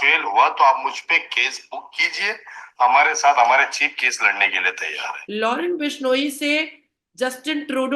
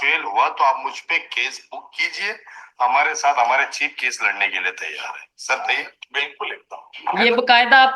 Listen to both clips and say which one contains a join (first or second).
first